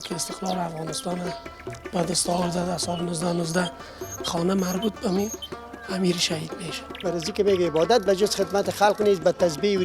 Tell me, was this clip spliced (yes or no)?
yes